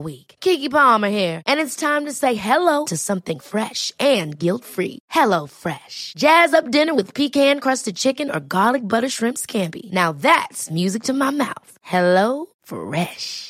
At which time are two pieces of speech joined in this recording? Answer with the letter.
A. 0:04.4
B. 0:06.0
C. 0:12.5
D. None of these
D